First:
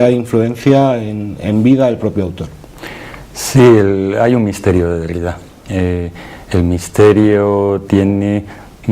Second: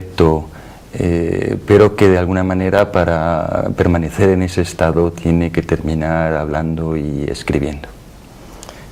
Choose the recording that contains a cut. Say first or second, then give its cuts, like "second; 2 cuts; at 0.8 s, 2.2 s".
first; 1 cut; at 3.4 s